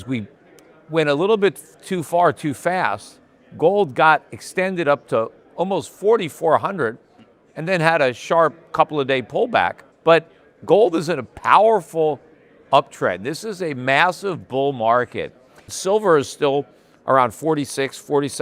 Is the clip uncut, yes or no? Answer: no